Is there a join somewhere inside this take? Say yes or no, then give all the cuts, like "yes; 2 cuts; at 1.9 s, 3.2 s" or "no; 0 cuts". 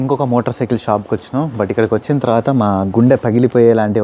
no; 0 cuts